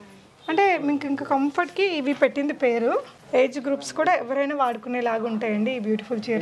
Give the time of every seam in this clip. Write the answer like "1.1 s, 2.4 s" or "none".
3.2 s